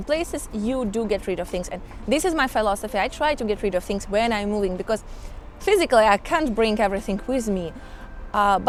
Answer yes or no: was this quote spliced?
no